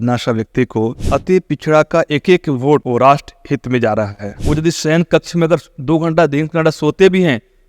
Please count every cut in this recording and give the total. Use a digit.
2